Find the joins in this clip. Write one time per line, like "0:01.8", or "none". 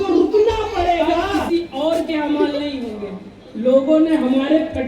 0:01.4